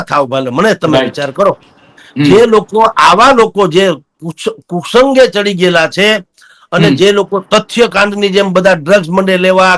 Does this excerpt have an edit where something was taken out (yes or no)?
no